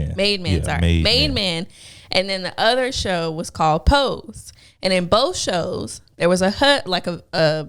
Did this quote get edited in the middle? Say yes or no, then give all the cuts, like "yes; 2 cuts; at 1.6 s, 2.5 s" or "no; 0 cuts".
no; 0 cuts